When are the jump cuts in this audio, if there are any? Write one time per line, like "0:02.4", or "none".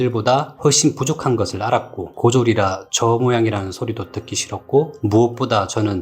0:02.8